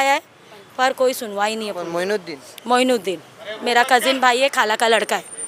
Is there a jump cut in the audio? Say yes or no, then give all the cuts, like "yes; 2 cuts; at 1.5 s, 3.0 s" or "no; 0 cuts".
no; 0 cuts